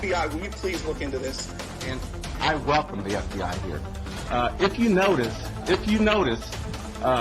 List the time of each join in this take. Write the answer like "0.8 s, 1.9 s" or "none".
none